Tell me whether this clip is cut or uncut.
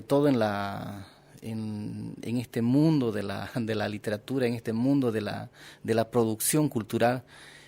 uncut